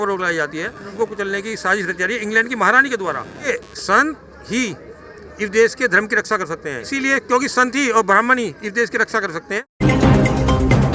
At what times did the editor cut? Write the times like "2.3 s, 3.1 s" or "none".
0.9 s, 3.4 s, 6.8 s, 9.7 s